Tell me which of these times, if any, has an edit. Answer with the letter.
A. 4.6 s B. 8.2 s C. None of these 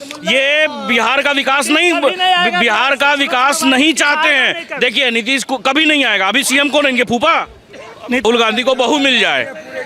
B